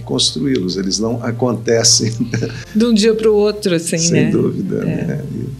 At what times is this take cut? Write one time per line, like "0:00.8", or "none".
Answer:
none